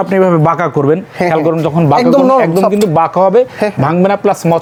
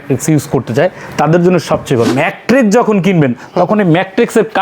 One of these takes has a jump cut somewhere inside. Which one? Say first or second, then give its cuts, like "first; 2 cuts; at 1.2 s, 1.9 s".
second; 1 cut; at 2.1 s